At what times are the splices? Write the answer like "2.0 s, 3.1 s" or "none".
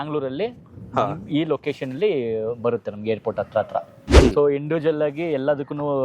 4.0 s